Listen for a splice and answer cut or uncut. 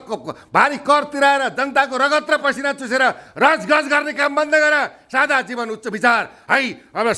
uncut